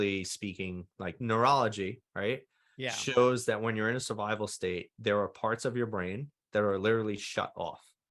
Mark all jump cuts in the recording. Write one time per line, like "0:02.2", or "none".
0:01.2